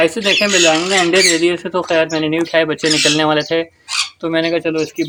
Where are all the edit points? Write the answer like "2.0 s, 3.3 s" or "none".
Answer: none